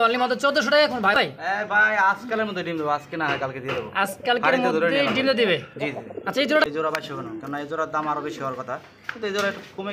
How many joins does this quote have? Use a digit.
2